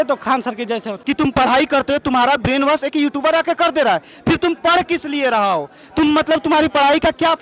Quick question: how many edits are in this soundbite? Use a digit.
1